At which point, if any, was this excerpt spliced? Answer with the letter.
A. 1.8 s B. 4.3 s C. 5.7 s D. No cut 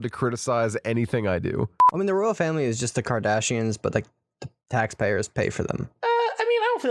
A